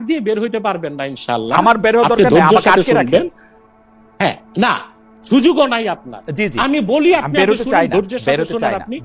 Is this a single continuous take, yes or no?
yes